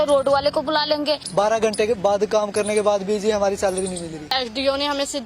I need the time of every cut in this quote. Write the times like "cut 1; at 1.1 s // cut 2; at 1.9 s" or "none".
cut 1; at 1.2 s // cut 2; at 4.3 s